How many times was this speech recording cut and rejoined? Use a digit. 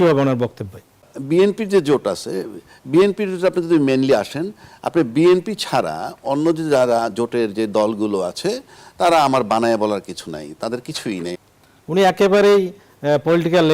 2